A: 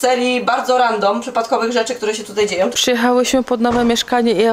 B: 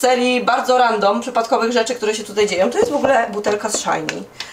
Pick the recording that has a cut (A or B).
A